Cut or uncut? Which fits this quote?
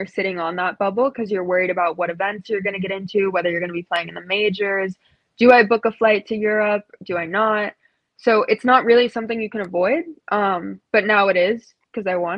uncut